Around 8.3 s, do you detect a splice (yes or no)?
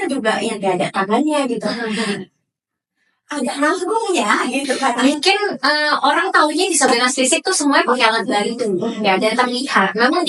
no